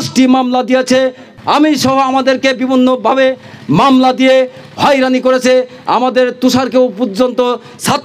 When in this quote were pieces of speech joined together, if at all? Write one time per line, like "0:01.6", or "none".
0:01.3